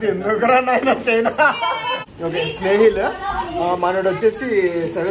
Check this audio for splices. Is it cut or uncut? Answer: cut